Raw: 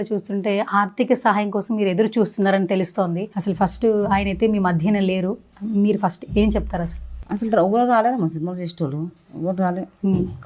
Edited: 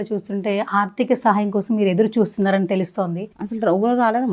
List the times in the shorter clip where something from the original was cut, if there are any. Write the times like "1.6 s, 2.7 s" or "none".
3.2 s